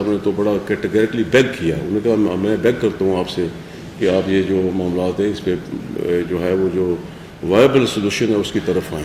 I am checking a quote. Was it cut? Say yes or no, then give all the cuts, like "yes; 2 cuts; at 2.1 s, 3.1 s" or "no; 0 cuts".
no; 0 cuts